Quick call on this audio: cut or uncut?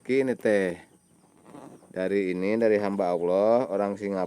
uncut